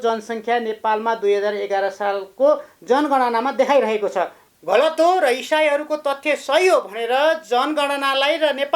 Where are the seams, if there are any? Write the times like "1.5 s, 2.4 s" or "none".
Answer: 4.4 s